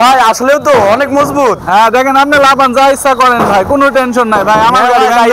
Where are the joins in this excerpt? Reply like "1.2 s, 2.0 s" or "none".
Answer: none